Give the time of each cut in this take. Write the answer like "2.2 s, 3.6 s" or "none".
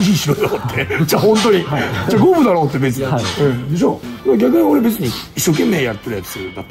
none